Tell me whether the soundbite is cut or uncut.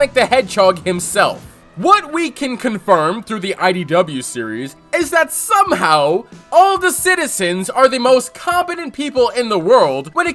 uncut